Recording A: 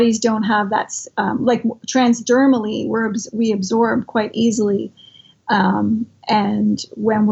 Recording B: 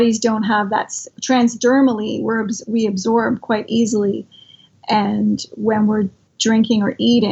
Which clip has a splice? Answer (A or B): B